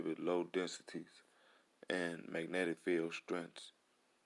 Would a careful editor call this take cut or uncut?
uncut